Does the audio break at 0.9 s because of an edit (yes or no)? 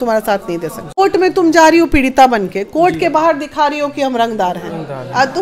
yes